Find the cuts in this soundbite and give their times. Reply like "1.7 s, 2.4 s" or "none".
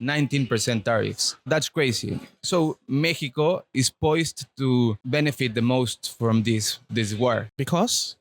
none